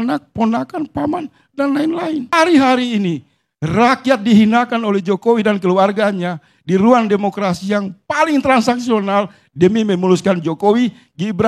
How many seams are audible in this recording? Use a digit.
1